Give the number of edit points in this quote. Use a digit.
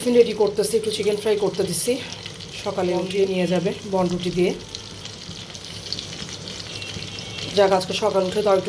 0